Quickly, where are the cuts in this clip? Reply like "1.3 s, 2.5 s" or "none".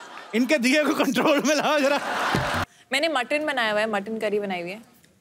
2.6 s